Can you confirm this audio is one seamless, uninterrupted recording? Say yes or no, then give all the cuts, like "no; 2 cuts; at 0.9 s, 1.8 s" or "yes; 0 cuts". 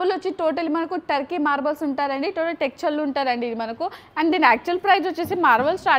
yes; 0 cuts